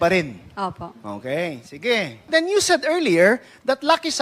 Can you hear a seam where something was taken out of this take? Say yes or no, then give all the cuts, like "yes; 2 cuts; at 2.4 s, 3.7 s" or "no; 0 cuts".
yes; 1 cut; at 2.3 s